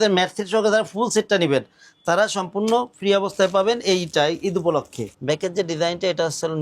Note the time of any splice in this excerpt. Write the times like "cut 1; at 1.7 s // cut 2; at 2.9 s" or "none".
cut 1; at 5.0 s